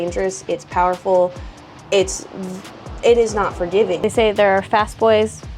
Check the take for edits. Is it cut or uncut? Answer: cut